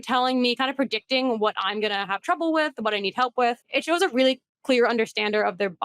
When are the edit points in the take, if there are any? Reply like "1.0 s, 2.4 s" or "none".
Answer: 3.6 s